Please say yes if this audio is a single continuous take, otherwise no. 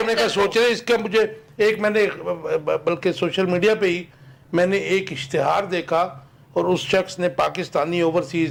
yes